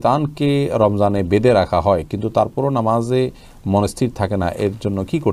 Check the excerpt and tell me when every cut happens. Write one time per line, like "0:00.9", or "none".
none